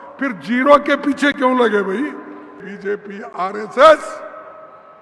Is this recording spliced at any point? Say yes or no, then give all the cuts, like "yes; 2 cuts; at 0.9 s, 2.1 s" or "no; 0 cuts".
yes; 1 cut; at 2.7 s